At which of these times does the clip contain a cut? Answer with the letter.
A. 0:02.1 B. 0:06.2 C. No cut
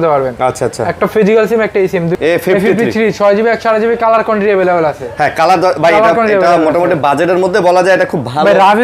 A